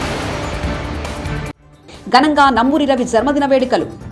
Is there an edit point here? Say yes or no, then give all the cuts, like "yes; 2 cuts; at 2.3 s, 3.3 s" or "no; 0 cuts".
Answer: yes; 1 cut; at 1.5 s